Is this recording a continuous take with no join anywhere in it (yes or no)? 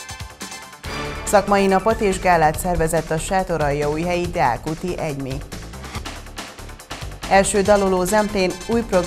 no